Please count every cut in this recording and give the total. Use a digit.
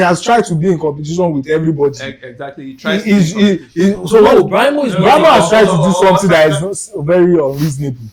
0